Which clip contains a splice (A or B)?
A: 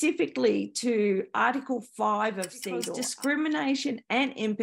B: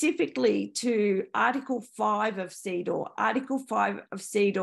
A